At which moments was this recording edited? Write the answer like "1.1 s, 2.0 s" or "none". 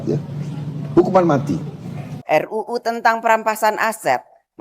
2.2 s